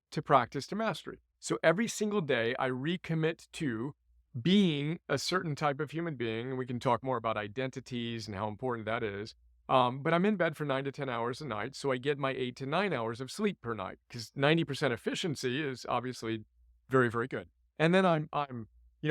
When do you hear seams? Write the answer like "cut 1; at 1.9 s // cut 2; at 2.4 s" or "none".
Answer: none